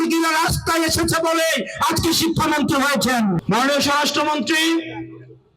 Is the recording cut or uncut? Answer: cut